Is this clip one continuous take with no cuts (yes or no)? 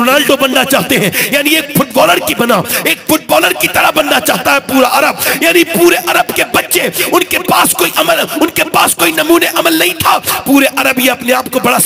yes